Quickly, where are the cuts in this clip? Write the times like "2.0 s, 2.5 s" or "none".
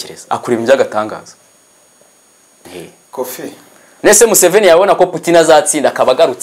2.6 s